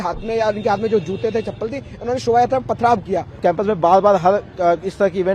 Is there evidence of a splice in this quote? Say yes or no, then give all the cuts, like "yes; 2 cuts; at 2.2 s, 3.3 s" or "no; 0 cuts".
yes; 1 cut; at 3.4 s